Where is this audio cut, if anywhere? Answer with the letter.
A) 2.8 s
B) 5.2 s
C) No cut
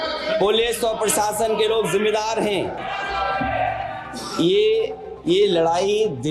A